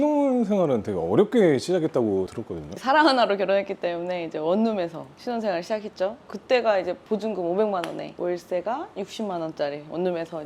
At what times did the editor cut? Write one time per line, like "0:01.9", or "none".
0:02.6
0:07.0